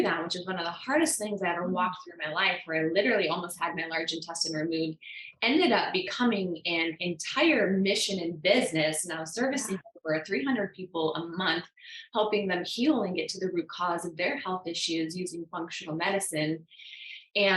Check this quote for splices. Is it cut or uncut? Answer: uncut